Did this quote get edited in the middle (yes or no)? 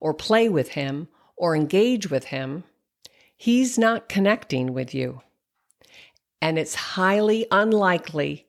no